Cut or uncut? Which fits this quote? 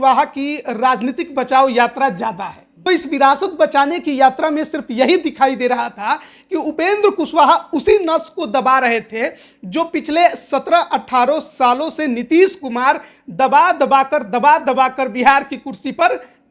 cut